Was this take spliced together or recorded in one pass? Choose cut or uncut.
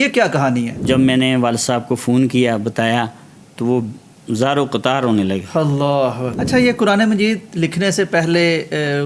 cut